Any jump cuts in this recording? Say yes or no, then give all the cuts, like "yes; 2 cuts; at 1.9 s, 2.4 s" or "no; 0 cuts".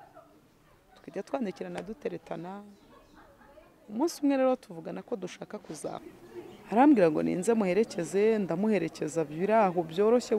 yes; 1 cut; at 6.0 s